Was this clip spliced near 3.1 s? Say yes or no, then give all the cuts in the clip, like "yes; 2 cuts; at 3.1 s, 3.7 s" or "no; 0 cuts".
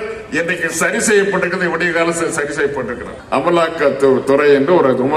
yes; 1 cut; at 3.1 s